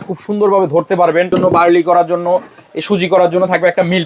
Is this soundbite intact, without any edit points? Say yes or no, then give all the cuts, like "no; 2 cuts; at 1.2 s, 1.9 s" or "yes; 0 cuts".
no; 1 cut; at 1.3 s